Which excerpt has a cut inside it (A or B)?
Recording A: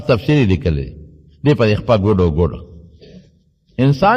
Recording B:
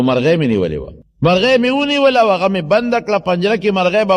B